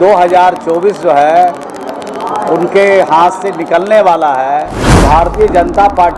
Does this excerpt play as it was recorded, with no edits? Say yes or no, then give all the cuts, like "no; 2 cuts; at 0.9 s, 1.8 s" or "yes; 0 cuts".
no; 1 cut; at 4.8 s